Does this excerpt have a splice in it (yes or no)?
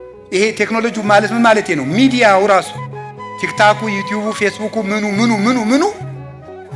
no